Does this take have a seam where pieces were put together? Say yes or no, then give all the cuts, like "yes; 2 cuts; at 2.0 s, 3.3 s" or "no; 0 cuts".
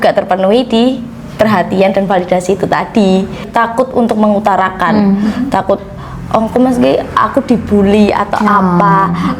yes; 1 cut; at 3.4 s